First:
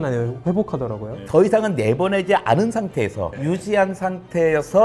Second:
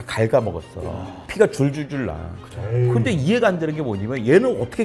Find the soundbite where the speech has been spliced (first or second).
first